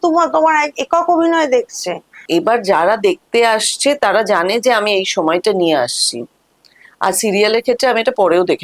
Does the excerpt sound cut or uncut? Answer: cut